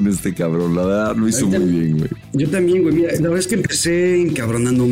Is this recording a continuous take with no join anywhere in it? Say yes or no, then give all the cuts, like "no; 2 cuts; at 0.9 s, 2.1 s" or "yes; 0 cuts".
no; 1 cut; at 1.9 s